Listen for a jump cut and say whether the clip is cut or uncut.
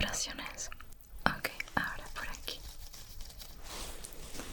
cut